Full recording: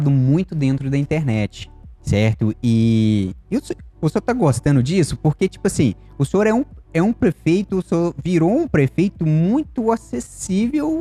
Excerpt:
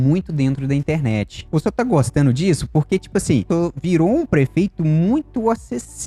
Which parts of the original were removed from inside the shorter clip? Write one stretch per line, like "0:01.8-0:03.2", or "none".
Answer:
0:01.6-0:03.9
0:06.0-0:07.9

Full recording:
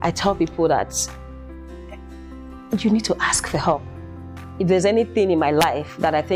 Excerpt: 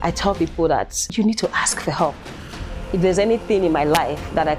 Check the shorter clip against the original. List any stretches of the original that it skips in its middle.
0:01.1-0:02.8

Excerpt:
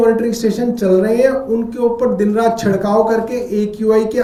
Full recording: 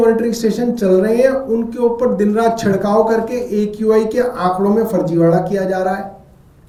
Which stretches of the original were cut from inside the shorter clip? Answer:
none

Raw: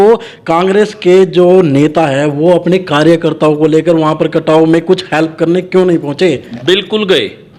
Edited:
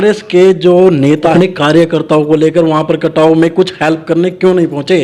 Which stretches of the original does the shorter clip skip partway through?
0:02.0-0:02.6

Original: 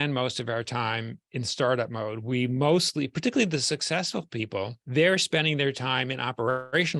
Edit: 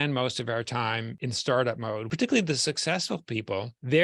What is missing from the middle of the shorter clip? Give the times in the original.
0:01.1-0:01.3
0:02.2-0:03.1

